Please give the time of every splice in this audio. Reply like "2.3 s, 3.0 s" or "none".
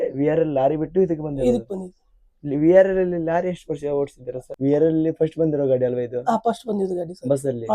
4.5 s